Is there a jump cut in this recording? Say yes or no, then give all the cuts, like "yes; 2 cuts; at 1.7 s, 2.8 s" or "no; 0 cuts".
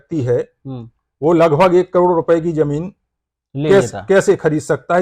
no; 0 cuts